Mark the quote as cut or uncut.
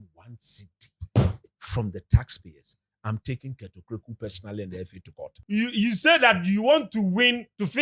cut